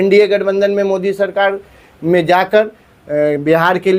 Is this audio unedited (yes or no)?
yes